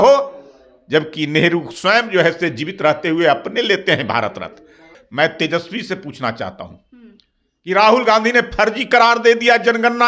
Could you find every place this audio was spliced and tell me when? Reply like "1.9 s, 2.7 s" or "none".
4.9 s